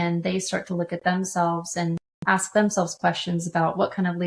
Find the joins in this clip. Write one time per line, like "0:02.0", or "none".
0:02.1